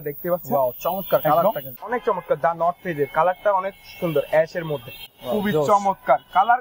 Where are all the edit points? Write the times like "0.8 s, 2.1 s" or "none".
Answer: 1.7 s, 5.0 s